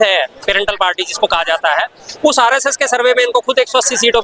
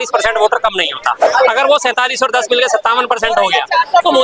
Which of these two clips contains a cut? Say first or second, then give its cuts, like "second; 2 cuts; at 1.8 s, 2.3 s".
second; 1 cut; at 1.2 s